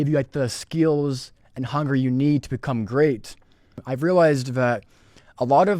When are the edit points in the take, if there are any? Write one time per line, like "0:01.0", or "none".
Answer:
0:03.9